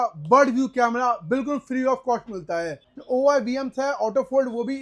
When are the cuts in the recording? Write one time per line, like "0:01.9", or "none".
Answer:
0:02.9